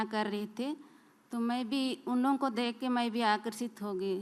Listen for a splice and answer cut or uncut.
uncut